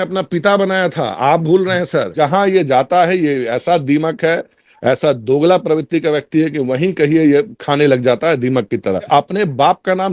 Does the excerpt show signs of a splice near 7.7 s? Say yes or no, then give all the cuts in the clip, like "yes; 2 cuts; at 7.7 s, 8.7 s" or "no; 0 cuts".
no; 2 cuts; at 2.1 s, 9.1 s